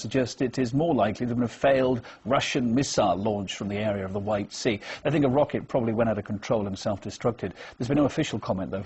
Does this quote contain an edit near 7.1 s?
yes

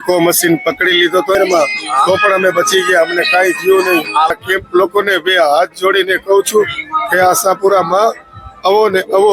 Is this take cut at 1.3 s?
yes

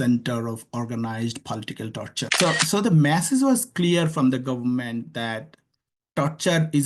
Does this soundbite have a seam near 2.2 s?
yes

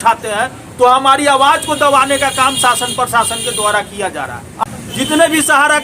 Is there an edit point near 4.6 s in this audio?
yes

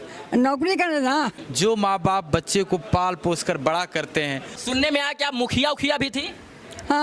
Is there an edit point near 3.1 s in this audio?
no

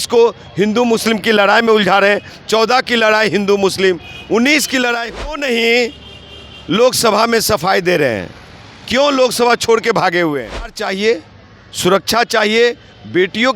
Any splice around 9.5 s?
no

